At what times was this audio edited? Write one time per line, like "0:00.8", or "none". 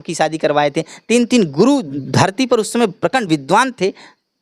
0:02.0